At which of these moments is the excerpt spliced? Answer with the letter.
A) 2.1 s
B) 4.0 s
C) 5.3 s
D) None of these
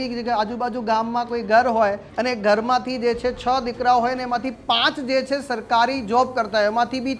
A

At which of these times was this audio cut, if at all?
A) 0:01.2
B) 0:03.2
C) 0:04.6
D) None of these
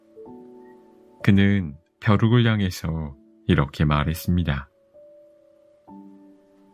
A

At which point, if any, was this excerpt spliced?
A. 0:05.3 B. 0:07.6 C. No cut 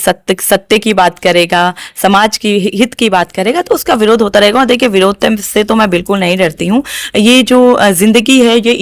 C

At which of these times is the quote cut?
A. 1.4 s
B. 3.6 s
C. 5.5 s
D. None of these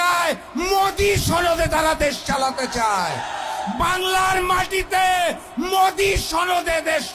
D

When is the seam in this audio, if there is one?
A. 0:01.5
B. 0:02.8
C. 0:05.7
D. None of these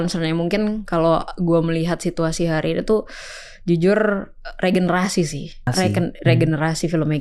C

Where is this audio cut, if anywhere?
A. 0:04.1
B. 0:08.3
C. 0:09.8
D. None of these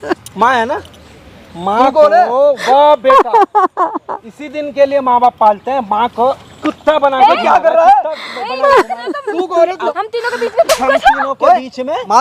C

